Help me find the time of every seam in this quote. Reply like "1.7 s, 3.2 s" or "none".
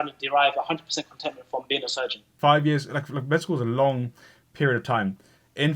2.3 s